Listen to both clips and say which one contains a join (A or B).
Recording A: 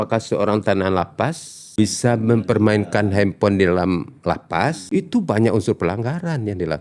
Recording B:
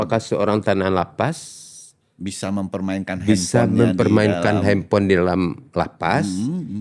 A